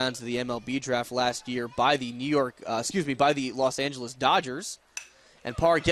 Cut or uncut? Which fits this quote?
uncut